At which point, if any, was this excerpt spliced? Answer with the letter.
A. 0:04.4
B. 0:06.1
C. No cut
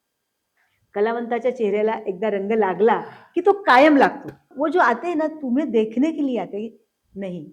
A